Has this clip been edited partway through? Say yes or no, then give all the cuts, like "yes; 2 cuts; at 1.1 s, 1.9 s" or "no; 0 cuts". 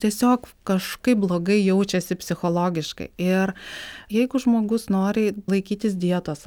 yes; 2 cuts; at 4.0 s, 5.5 s